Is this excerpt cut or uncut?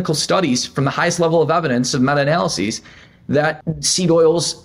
cut